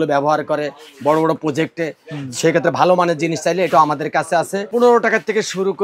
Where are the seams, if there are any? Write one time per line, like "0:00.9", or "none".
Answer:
0:04.7